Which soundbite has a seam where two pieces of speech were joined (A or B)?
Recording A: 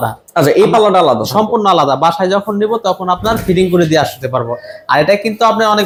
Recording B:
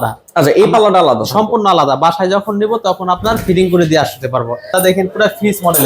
B